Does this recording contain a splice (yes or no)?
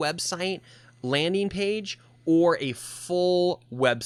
no